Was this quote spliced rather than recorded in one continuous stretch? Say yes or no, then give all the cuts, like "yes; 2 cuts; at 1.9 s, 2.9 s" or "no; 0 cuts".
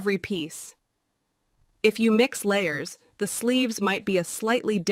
no; 0 cuts